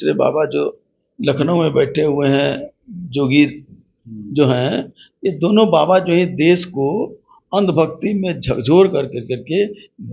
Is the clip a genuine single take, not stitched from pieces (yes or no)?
yes